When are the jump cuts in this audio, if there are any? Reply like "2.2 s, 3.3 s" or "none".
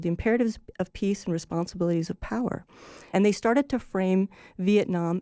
3.0 s